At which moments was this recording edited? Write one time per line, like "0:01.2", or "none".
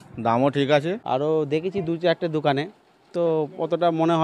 0:01.0